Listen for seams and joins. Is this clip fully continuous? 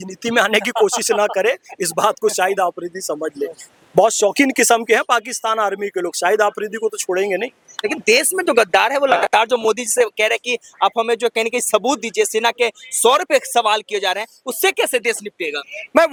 yes; 0 cuts

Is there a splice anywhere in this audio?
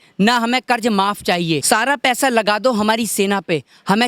yes; 1 cut; at 1.6 s

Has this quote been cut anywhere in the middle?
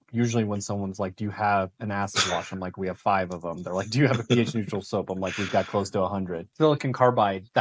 yes; 1 cut; at 6.4 s

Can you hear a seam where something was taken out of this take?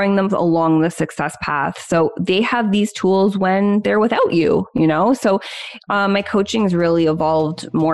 no; 0 cuts

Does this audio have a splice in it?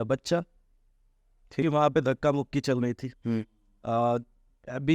yes; 1 cut; at 1.6 s

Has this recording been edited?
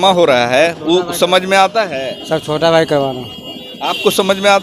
no; 0 cuts

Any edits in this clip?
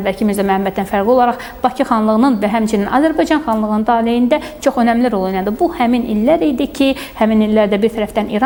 no; 0 cuts

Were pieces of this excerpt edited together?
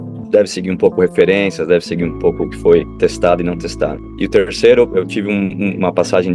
yes; 2 cuts; at 2.9 s, 4.1 s

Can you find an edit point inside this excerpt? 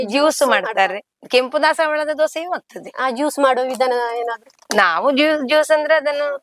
no; 0 cuts

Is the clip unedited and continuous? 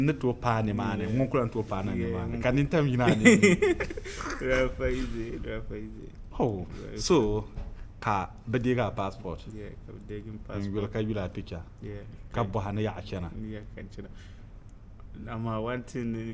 yes; 0 cuts

